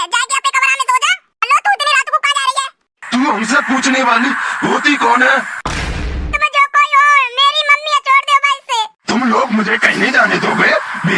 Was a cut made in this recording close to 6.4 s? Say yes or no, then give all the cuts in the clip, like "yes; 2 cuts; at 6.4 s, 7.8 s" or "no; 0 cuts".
yes; 1 cut; at 6.4 s